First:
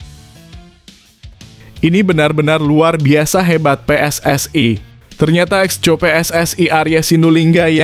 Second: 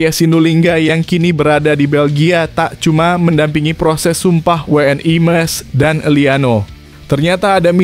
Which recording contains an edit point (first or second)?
first